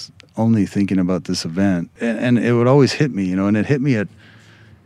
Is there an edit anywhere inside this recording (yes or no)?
yes